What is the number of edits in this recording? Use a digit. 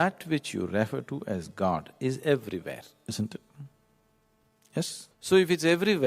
1